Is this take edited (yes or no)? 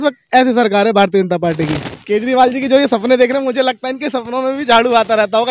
yes